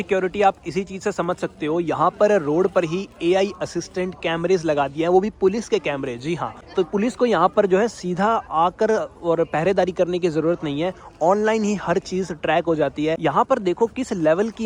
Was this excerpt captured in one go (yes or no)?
yes